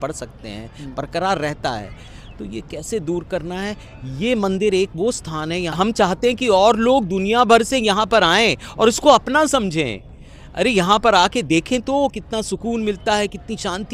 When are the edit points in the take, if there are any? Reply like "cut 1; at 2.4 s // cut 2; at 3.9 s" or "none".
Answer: cut 1; at 5.7 s